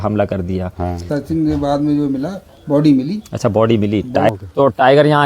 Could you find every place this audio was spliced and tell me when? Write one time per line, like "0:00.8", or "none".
0:01.1
0:04.3